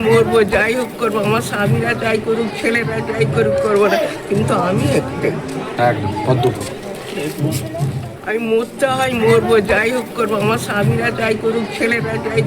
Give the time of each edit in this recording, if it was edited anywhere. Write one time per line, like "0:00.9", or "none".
0:08.1